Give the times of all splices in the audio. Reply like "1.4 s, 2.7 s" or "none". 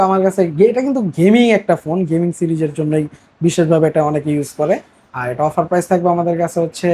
none